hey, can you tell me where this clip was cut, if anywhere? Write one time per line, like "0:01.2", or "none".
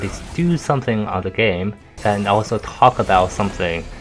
0:01.9